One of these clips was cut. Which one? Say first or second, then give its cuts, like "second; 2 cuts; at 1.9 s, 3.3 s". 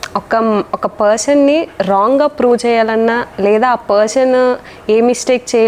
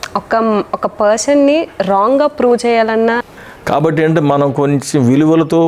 second; 1 cut; at 3.3 s